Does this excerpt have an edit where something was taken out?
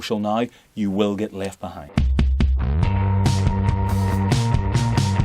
yes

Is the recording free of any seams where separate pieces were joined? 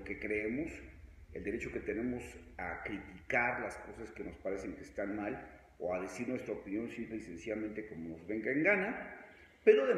yes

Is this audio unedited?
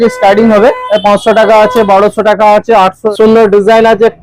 no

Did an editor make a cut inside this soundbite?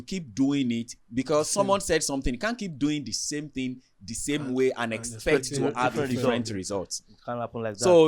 no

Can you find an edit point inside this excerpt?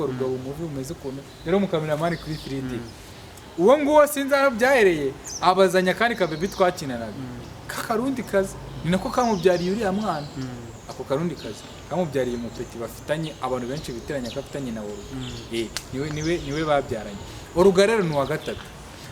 no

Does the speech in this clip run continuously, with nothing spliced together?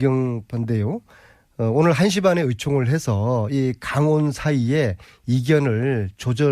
no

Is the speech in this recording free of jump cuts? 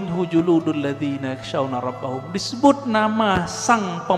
yes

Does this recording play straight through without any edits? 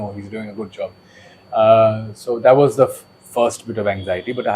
yes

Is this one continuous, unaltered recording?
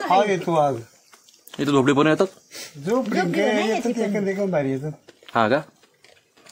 yes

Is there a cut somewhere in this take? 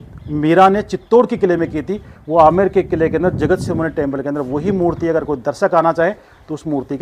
no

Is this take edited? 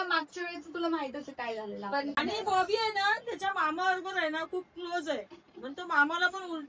yes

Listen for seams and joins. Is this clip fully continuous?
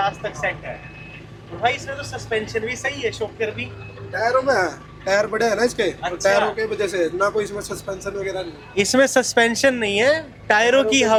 yes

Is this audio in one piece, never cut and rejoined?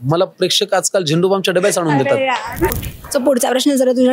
no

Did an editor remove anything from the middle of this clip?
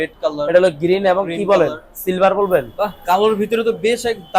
yes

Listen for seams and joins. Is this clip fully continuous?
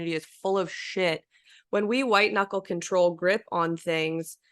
no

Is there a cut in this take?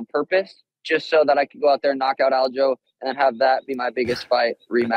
no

